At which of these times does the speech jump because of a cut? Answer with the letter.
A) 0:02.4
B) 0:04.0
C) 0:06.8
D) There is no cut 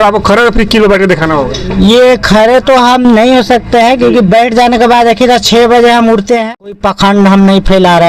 C